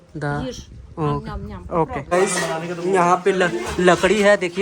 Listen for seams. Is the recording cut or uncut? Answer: cut